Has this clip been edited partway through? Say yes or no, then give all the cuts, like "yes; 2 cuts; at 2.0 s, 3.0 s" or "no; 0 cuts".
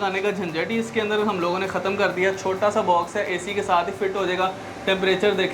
no; 0 cuts